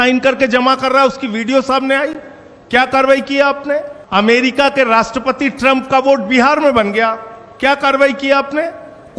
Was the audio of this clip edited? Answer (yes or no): yes